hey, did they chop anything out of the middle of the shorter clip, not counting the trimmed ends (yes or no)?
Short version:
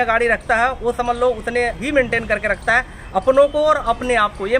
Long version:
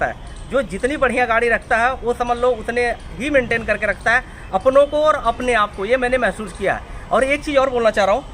yes